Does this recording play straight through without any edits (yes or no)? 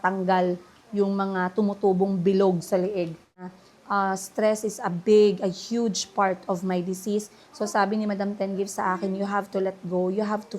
no